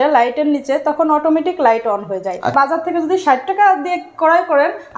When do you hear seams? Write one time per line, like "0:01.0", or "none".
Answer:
0:02.5

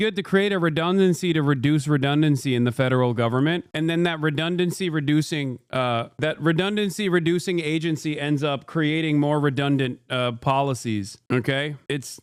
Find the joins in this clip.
none

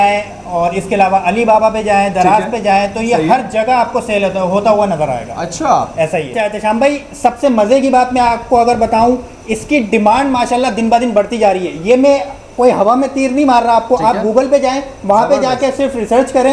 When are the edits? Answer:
none

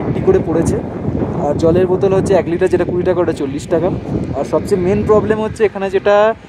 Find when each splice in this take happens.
none

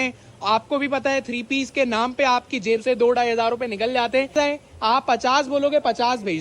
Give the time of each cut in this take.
0:04.3

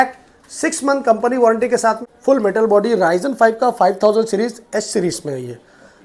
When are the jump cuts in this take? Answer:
0:02.0

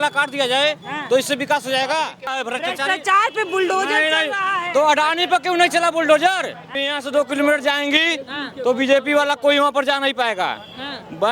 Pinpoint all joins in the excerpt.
0:02.4
0:06.8

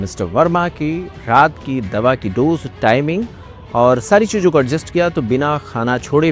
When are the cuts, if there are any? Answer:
none

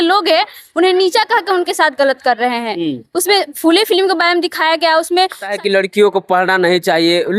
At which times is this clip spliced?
0:05.5

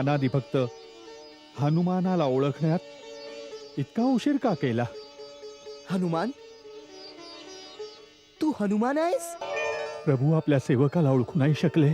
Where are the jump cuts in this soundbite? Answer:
0:09.5

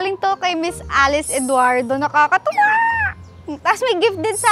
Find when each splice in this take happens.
none

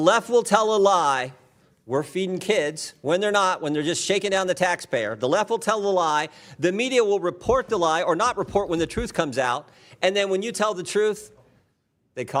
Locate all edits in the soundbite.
none

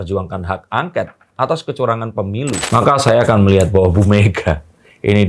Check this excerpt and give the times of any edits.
0:02.6

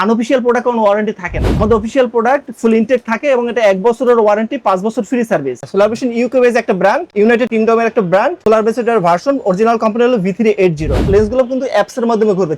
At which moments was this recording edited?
0:05.7
0:07.5
0:11.0

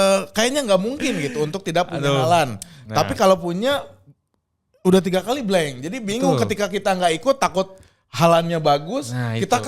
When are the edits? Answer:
none

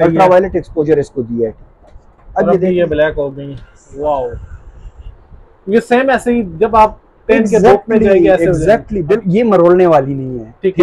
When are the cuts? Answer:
0:01.6
0:09.2

